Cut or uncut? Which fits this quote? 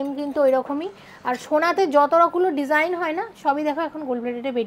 uncut